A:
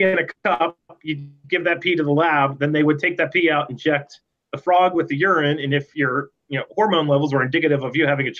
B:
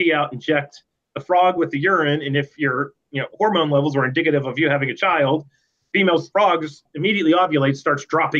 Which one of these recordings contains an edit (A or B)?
B